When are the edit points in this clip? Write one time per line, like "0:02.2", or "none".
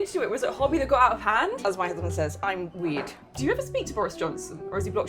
0:01.6
0:03.2